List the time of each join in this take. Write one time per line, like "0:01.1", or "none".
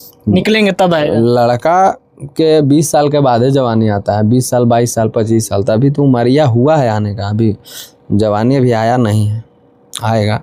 none